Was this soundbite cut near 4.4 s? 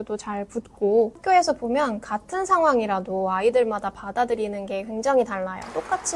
no; 1 cut; at 1.2 s

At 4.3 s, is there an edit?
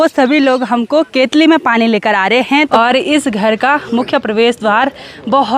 no; 1 cut; at 2.7 s

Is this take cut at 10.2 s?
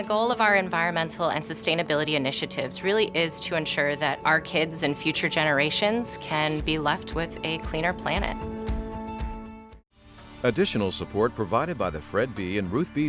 yes; 1 cut; at 10.2 s

